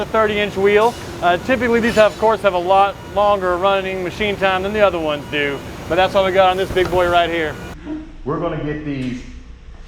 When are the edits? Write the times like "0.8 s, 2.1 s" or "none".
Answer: 7.7 s